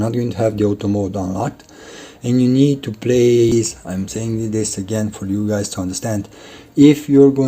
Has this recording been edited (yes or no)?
yes